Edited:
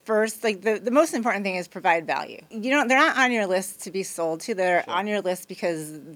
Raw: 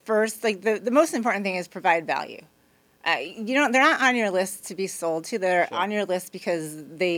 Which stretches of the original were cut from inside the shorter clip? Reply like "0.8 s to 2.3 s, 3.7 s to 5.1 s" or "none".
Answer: 2.5 s to 3.3 s